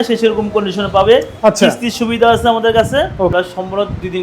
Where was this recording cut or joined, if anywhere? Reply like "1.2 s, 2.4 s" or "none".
3.3 s